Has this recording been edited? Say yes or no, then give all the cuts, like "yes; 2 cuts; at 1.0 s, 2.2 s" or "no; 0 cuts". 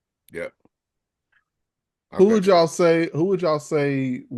no; 0 cuts